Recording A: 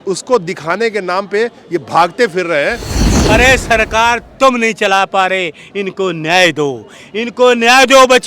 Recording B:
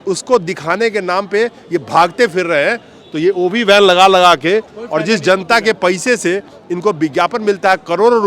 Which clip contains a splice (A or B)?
A